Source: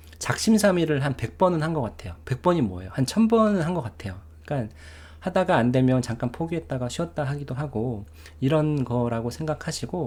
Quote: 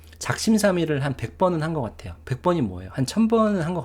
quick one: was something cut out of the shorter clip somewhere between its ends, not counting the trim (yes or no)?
no